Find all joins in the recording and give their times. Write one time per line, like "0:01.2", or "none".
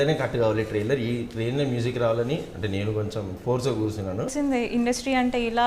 0:04.3

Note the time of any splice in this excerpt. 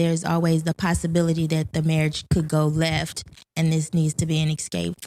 none

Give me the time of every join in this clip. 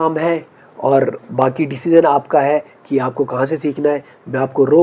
none

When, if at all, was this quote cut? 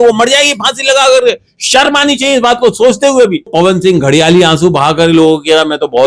0:03.5

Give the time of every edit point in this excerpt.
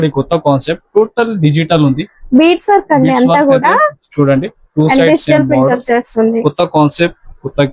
none

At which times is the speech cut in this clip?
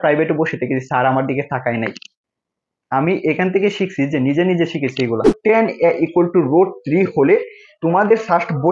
0:05.3

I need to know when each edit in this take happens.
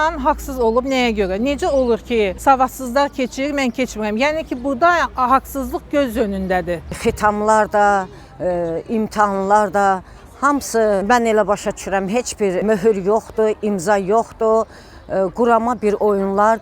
0:02.4
0:07.0
0:11.0
0:12.6

